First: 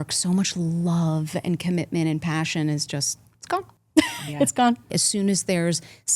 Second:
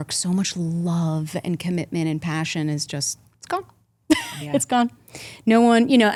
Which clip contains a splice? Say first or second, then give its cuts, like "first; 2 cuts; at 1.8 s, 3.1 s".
first; 2 cuts; at 3.8 s, 5.0 s